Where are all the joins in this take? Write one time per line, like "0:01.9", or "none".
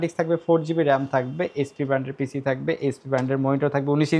none